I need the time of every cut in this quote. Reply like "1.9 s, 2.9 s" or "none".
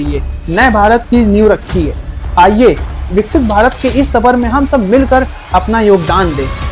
none